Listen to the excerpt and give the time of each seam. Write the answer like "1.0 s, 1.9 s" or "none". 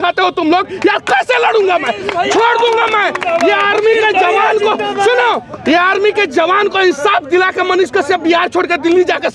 none